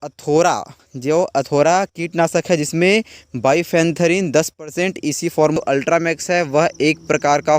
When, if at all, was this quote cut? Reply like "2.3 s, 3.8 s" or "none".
5.6 s